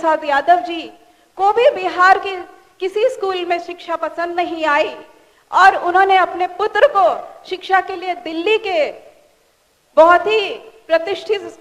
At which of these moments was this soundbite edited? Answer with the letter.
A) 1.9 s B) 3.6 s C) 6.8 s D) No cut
D